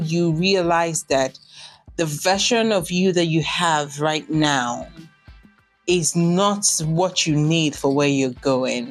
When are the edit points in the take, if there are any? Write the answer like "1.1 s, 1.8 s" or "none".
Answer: none